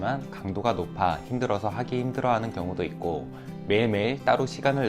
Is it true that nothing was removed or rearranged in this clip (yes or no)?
yes